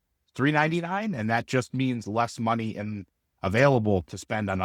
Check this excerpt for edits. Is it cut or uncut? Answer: uncut